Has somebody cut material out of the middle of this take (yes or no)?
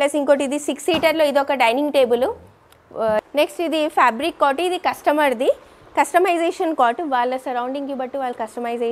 yes